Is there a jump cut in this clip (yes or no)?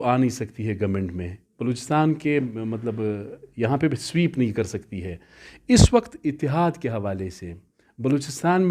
no